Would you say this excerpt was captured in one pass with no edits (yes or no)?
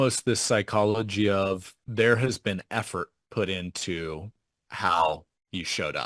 no